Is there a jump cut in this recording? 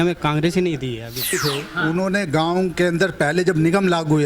yes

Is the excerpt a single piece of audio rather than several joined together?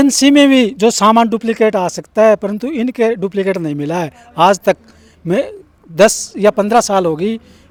yes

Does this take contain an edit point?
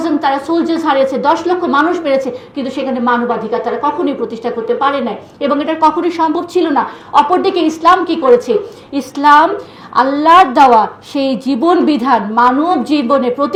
no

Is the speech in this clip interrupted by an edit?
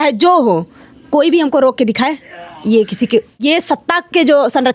yes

